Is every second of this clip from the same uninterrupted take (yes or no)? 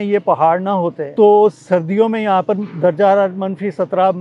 no